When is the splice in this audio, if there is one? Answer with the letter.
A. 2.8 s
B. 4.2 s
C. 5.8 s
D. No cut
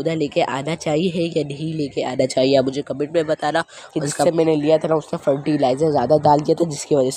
B